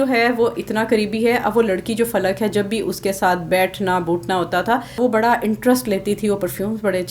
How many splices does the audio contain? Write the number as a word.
one